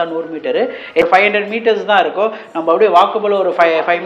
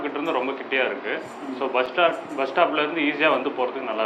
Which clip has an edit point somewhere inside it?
first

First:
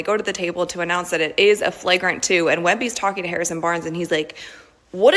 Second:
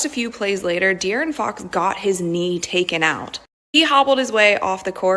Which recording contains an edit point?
first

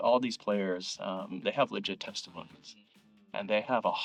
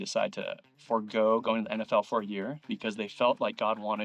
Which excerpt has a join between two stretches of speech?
second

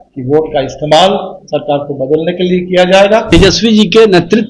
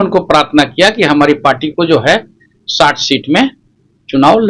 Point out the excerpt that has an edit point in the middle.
first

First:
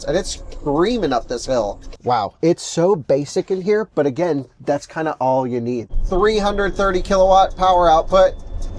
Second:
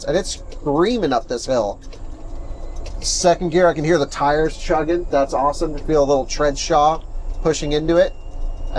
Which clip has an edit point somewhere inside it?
first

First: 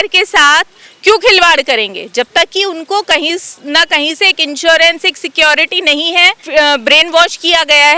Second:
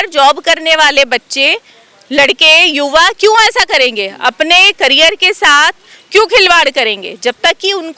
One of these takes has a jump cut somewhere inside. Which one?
first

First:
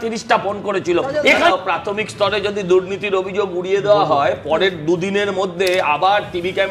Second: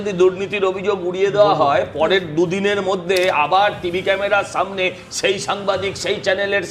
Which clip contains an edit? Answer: first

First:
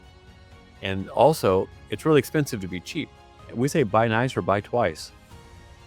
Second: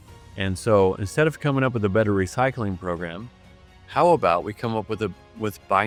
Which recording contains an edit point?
first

